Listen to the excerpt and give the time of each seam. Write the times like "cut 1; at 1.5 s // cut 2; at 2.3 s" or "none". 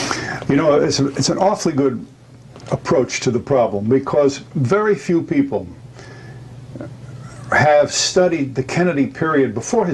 none